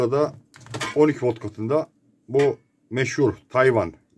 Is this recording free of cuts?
yes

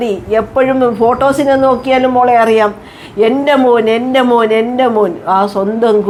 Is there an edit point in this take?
no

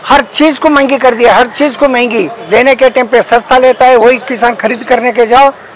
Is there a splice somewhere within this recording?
yes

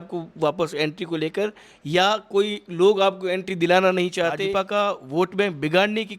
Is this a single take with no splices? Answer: no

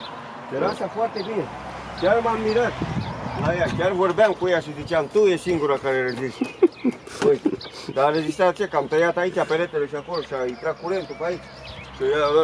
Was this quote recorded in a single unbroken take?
yes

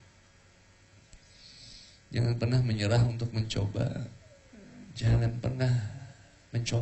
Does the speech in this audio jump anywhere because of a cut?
yes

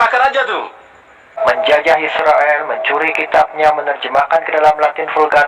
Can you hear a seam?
yes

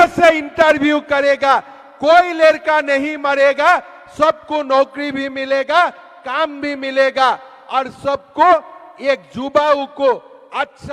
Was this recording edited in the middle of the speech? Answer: no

